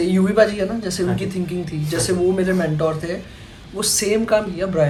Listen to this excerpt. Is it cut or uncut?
uncut